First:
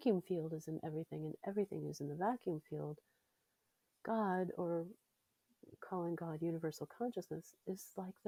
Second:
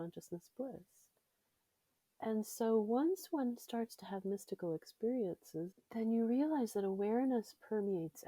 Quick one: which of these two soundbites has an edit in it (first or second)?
second